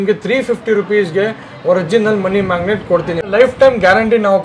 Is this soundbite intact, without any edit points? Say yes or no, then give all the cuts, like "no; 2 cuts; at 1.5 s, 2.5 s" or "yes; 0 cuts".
no; 1 cut; at 3.3 s